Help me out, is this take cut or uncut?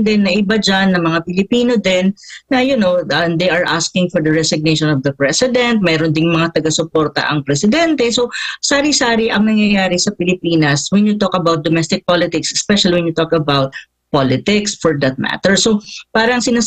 uncut